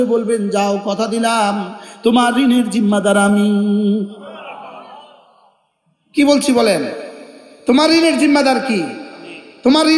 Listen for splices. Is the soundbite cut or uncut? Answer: uncut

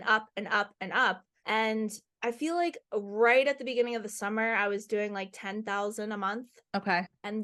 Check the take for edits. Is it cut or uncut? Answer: uncut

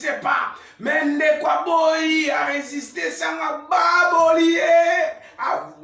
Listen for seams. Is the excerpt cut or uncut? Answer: uncut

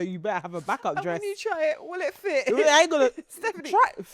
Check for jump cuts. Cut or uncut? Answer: uncut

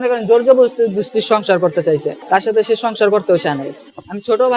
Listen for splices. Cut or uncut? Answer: cut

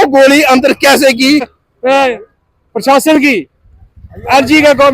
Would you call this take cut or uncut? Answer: cut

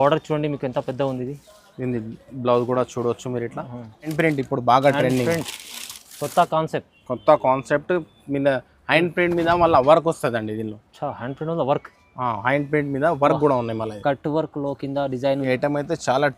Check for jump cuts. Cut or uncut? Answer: cut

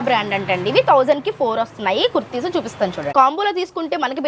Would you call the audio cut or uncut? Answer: cut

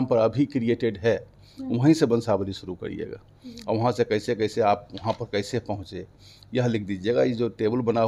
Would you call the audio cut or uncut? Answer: uncut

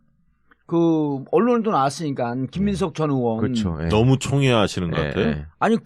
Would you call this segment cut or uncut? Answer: cut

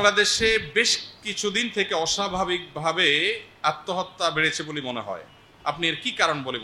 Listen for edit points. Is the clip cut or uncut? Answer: uncut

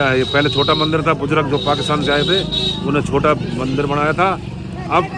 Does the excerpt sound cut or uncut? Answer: uncut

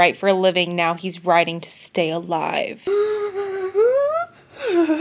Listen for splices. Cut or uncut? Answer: cut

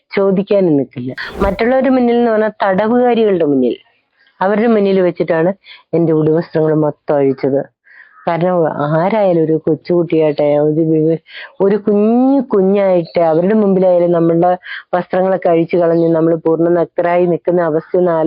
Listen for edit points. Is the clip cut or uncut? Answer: cut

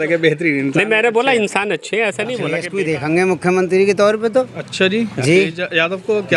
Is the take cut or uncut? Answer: cut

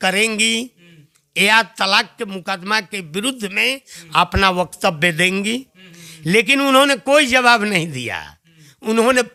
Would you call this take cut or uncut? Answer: uncut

